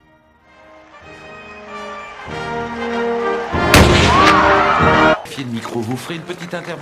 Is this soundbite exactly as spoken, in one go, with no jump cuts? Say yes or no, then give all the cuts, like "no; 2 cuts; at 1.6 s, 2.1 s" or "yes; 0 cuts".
no; 1 cut; at 5.3 s